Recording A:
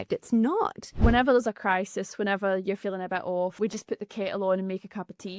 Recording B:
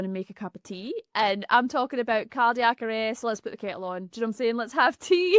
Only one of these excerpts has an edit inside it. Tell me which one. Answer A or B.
A